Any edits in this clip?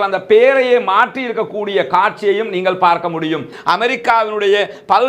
yes; 1 cut; at 3.5 s

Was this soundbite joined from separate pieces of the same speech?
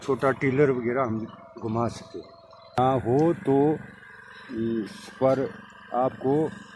yes; 1 cut; at 2.8 s

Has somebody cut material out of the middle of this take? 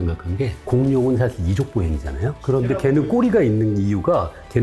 no; 0 cuts

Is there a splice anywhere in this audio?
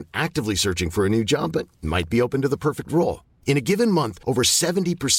no; 0 cuts

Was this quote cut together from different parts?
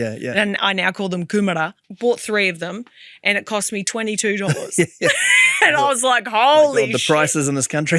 yes; 1 cut; at 1.8 s

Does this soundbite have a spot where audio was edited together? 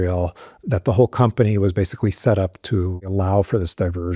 yes; 1 cut; at 3.1 s

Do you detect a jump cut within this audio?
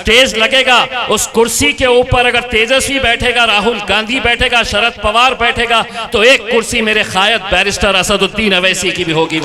no; 0 cuts

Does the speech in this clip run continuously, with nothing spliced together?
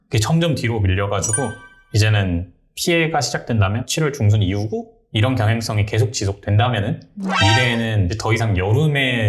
no; 1 cut; at 5.0 s

